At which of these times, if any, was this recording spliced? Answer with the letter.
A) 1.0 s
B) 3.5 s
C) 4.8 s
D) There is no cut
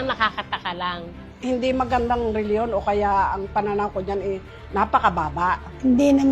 A